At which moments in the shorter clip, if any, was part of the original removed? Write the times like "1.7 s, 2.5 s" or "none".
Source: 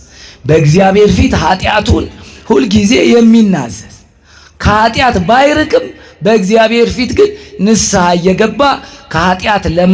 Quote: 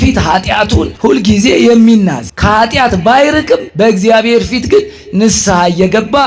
0.9 s, 2.3 s, 3.7 s

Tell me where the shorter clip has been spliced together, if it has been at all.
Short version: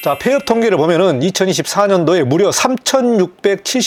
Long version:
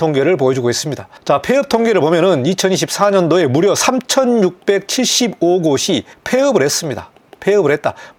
none

